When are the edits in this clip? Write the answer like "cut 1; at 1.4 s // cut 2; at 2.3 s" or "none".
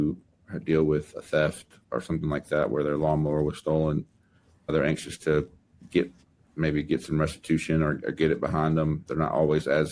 cut 1; at 1.8 s // cut 2; at 4.7 s